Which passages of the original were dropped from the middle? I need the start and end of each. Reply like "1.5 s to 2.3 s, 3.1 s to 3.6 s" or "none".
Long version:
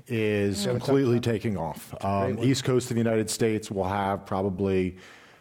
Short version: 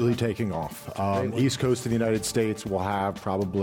none